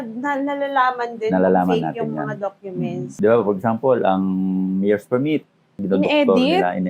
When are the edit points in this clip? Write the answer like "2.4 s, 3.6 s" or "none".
3.0 s, 5.8 s